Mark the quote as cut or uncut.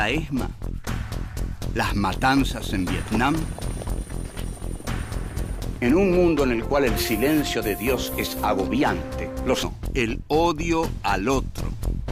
uncut